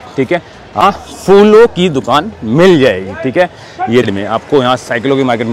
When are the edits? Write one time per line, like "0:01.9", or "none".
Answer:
0:00.8
0:04.1